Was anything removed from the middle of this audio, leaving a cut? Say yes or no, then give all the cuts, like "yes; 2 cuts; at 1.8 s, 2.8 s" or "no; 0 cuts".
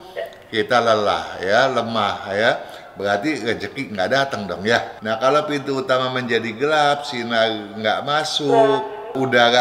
yes; 1 cut; at 4.9 s